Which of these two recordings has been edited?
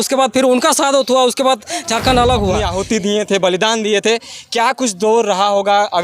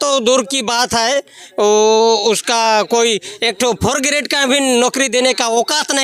first; 1 cut; at 2.6 s

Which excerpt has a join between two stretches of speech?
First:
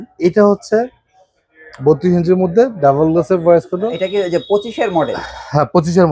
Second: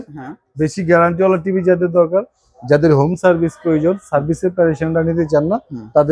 first; 1 cut; at 3.9 s

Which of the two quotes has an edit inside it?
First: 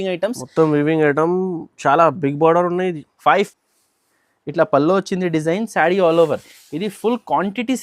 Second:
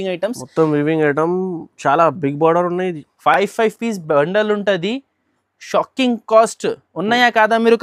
first; 1 cut; at 3.3 s

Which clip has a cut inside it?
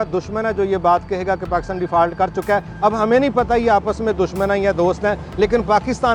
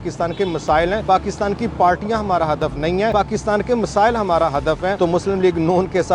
second; 3 cuts; at 1.0 s, 3.1 s, 5.0 s

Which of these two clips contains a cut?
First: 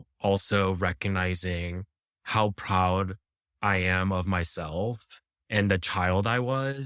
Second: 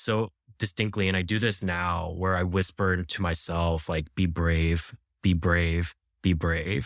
first; 1 cut; at 5.3 s

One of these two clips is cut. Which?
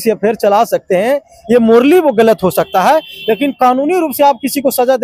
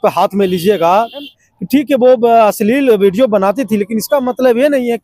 second; 1 cut; at 1.3 s

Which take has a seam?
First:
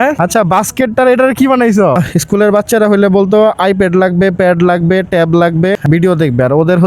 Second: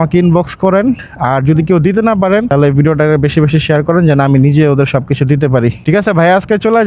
first; 2 cuts; at 2.0 s, 5.8 s

